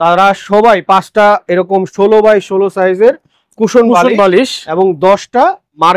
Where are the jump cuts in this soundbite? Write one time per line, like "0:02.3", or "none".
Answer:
none

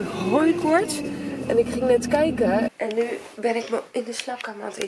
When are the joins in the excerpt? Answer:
0:02.7

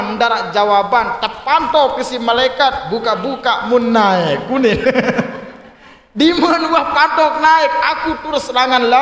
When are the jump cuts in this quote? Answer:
none

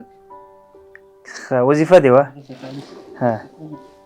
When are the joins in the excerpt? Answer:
0:02.5

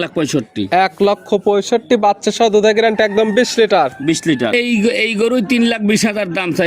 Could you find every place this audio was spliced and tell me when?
0:04.5

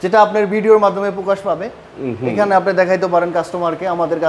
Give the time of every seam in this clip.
none

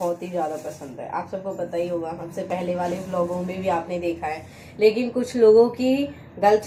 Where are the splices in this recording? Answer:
none

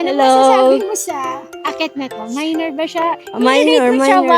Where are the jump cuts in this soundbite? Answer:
0:01.5

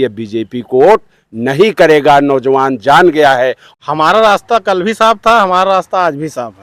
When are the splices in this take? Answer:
0:03.6

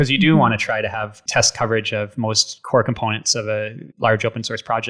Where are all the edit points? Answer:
0:01.2
0:02.5
0:03.8

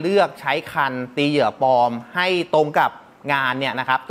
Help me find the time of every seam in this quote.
none

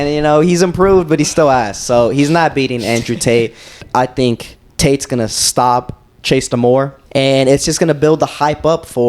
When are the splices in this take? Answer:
0:03.8
0:07.0

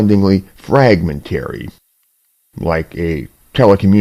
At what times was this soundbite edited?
0:02.9

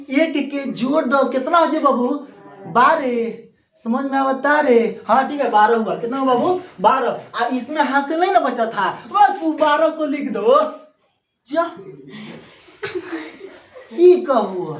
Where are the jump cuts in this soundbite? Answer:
none

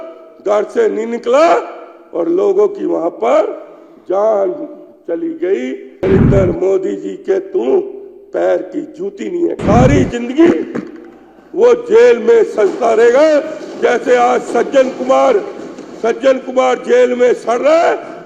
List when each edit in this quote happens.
0:06.0
0:09.6

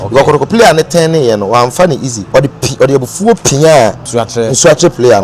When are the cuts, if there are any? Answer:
0:02.1
0:04.0

